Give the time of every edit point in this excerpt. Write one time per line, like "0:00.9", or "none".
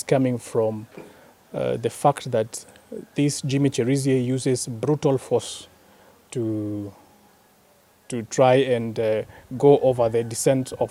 none